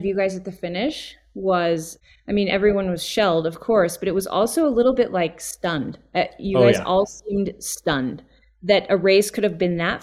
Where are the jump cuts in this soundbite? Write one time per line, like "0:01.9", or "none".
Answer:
0:02.0